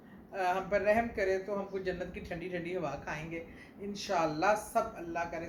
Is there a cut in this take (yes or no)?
no